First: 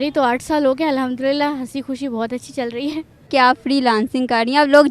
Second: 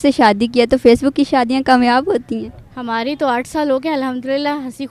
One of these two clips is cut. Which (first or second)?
first